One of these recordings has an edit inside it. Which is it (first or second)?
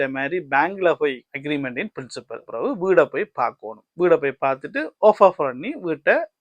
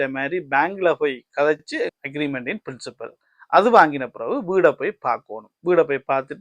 first